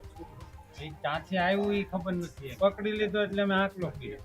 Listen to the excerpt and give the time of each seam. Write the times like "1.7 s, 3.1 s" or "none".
2.5 s